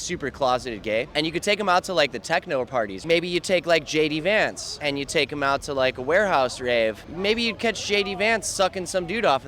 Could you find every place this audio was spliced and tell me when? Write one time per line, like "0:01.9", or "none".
0:01.1
0:03.0
0:04.7
0:07.1